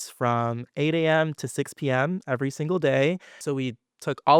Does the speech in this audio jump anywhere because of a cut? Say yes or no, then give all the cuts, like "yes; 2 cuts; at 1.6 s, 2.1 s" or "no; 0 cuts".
yes; 1 cut; at 3.4 s